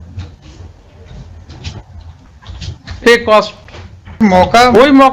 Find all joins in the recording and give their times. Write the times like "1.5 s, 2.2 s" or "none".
4.2 s